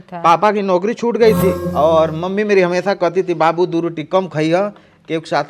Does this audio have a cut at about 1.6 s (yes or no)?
yes